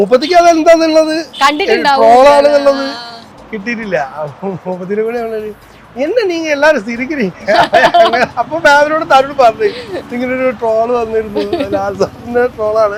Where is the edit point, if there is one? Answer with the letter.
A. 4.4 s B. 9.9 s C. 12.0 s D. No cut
D